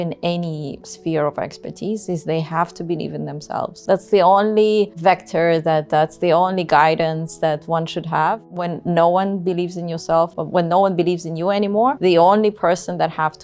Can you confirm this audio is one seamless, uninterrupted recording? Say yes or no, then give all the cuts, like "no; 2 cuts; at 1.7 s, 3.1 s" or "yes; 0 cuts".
yes; 0 cuts